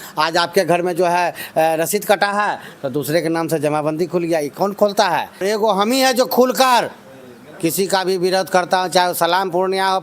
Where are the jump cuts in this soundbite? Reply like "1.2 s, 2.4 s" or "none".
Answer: 5.4 s

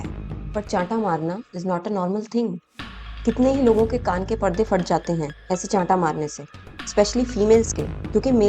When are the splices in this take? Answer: none

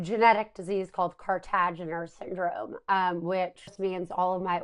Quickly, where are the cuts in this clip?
3.7 s

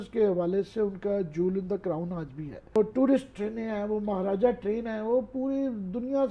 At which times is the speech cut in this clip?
2.8 s

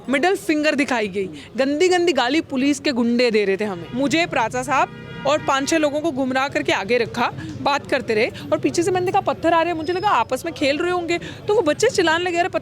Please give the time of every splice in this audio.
3.8 s

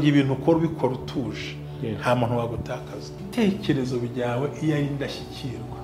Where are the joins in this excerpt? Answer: 3.2 s

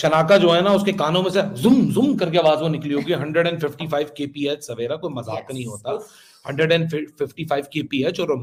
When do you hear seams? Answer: none

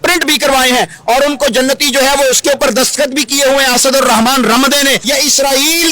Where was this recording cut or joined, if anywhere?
5.0 s

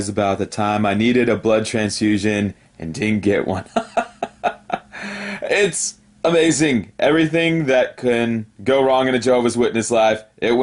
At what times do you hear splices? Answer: none

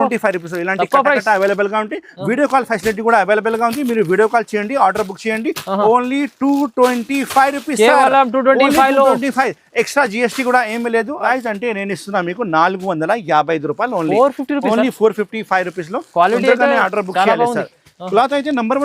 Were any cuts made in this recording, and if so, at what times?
11.3 s

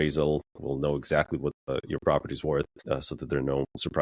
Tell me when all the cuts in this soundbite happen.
1.7 s, 2.8 s

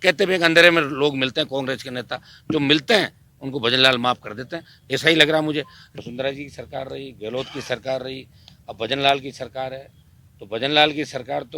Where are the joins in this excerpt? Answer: 5.8 s

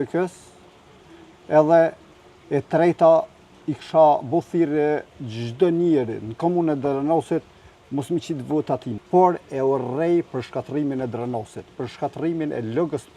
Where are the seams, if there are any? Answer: 8.9 s

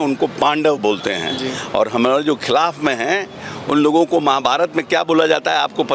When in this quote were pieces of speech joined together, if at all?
none

